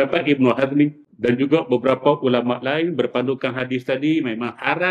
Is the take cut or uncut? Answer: cut